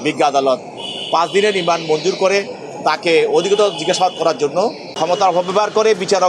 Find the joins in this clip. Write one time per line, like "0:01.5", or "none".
0:04.9